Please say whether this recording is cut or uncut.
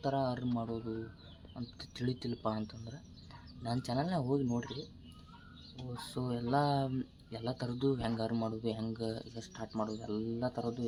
uncut